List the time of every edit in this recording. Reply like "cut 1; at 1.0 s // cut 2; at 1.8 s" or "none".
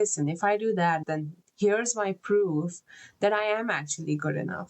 cut 1; at 1.0 s